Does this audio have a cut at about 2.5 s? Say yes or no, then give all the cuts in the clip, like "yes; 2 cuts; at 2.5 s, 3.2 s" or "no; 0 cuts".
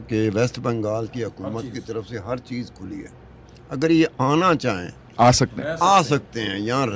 no; 0 cuts